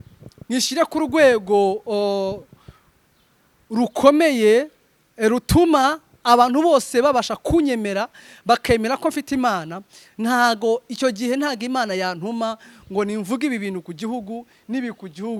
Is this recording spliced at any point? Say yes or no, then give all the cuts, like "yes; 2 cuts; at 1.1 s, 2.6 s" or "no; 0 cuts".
no; 0 cuts